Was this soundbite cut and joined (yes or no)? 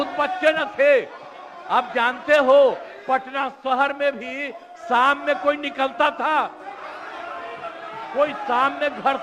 no